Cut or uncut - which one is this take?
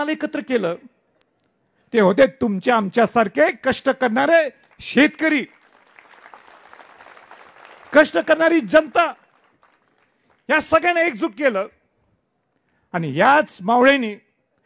uncut